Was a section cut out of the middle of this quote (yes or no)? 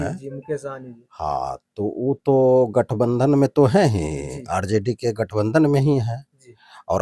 no